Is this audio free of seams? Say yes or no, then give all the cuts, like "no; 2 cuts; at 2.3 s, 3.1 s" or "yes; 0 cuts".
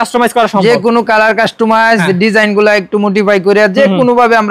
yes; 0 cuts